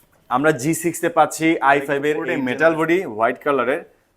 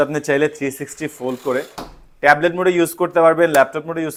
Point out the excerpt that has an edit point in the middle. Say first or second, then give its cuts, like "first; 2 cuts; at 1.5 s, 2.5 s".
first; 1 cut; at 2.3 s